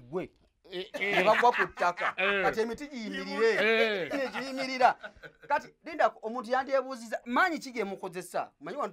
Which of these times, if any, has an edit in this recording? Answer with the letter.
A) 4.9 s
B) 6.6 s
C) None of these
C